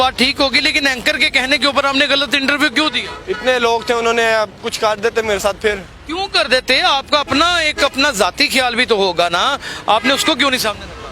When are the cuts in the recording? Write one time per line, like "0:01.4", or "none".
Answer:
none